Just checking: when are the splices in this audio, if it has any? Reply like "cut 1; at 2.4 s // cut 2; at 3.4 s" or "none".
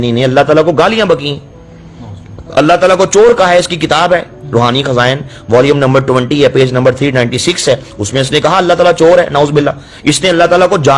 none